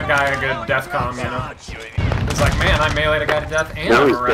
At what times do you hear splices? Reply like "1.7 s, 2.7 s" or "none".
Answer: 2.0 s